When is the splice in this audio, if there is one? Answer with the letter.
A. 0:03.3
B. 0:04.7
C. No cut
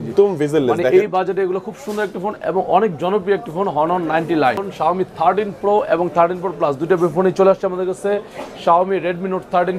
B